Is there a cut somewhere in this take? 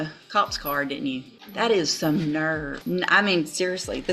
yes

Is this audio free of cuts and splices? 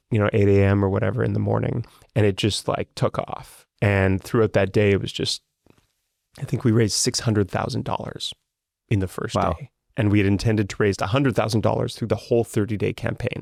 yes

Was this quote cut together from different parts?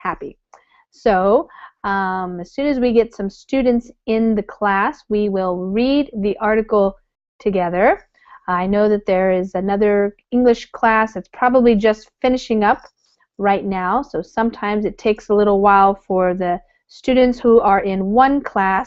yes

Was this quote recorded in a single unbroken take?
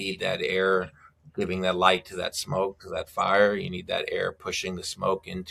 yes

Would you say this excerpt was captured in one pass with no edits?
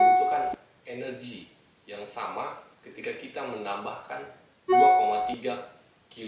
no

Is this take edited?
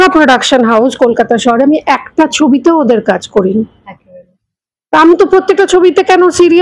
no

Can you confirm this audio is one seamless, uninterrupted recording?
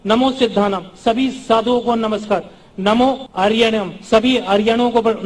no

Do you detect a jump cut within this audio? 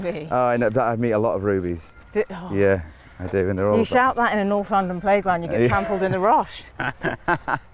no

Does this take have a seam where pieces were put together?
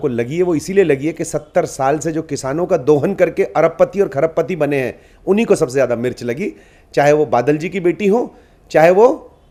no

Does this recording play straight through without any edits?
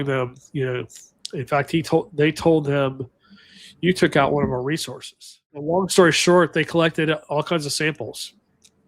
no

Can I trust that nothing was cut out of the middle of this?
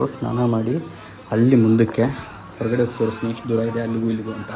yes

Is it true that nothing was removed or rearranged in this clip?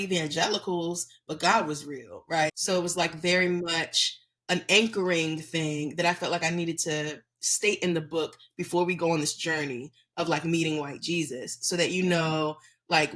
no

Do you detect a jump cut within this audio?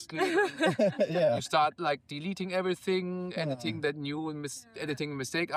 no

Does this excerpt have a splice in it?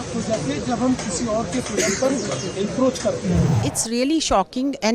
yes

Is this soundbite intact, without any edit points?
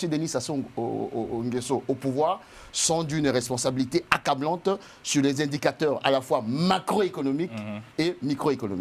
yes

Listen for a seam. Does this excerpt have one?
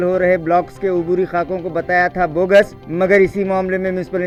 no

